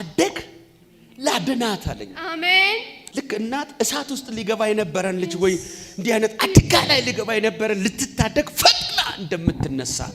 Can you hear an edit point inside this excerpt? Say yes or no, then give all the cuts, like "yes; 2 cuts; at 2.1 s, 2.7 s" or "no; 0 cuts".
yes; 1 cut; at 3.0 s